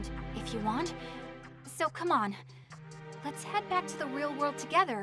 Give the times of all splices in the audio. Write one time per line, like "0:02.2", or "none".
none